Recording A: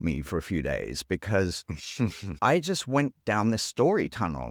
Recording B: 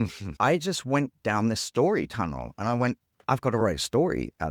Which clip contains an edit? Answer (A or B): B